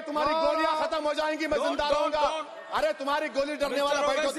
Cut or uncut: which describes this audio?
uncut